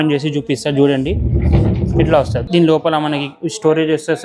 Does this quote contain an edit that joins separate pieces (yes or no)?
yes